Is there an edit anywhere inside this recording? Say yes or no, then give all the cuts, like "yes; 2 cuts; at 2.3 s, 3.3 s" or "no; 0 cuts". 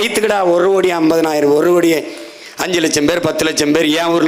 no; 0 cuts